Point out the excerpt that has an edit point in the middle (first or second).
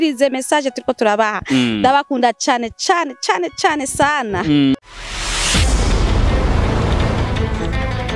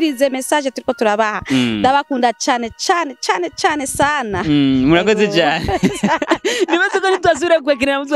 first